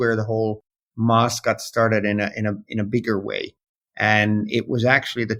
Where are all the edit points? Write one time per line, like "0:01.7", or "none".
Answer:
none